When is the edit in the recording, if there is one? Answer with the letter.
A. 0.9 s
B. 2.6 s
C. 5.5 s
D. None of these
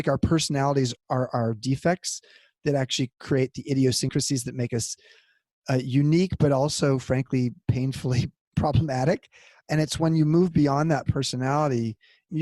A